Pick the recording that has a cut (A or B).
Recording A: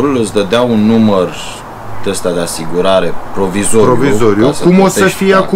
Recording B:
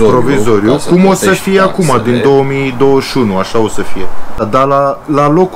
B